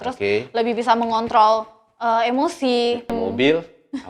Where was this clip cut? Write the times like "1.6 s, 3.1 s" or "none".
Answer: 3.1 s